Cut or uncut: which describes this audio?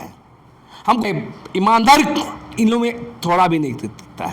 cut